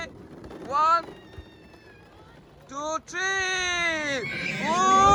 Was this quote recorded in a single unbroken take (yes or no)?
yes